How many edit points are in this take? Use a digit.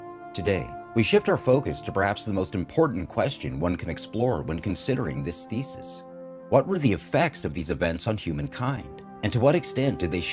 1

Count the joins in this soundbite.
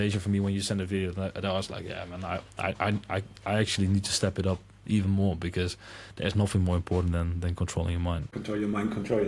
1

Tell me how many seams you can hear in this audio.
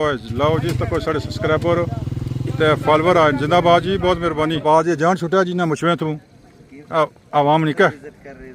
1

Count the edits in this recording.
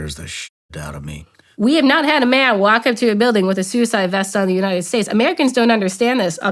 1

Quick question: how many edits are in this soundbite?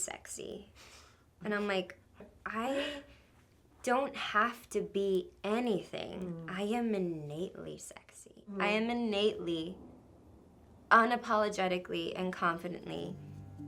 2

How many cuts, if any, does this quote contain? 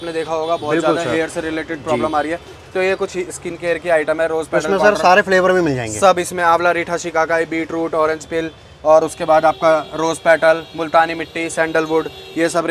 0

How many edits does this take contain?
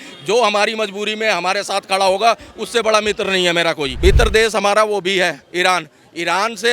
1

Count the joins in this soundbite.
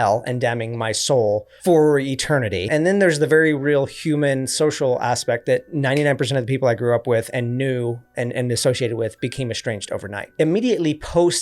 3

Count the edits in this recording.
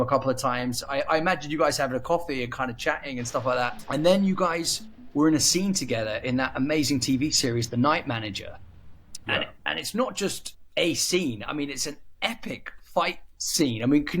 1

